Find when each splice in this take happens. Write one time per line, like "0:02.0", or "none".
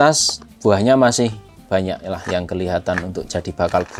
none